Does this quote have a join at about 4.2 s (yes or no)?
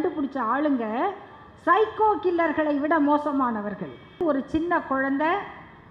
yes